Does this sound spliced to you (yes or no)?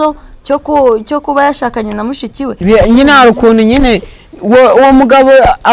yes